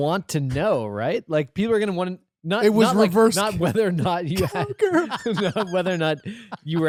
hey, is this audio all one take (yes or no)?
yes